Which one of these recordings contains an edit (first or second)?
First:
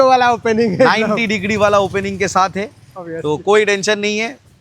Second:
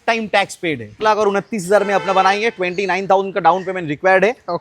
second